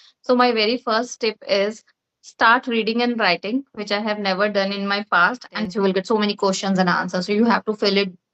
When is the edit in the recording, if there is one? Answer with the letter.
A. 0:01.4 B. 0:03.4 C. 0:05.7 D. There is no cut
C